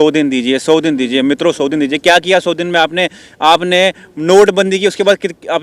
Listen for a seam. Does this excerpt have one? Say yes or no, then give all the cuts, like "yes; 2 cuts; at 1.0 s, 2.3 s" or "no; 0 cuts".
no; 0 cuts